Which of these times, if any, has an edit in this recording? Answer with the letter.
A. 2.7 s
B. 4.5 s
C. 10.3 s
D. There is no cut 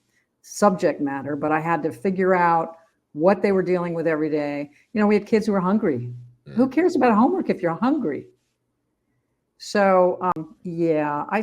C